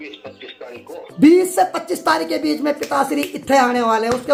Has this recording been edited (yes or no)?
no